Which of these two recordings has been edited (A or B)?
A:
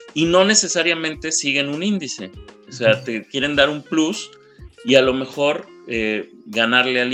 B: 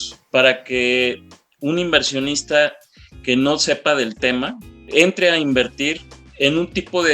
B